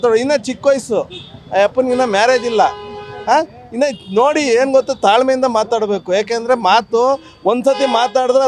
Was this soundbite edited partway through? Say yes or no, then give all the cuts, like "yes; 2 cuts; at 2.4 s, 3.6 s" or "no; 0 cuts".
no; 0 cuts